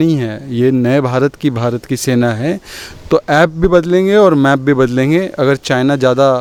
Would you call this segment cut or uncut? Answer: uncut